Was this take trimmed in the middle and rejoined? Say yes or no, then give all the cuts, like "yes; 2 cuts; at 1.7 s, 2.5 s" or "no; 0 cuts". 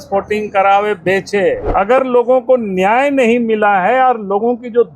yes; 1 cut; at 1.6 s